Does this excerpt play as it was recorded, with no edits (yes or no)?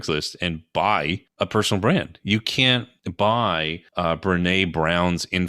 no